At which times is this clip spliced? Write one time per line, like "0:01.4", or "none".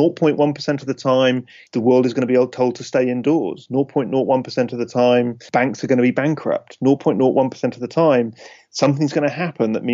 0:01.5
0:05.4